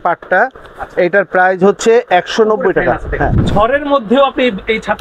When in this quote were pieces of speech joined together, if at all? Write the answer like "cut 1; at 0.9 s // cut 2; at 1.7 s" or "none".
cut 1; at 3.4 s